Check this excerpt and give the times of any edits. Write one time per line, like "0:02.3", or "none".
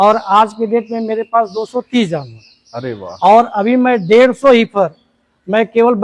none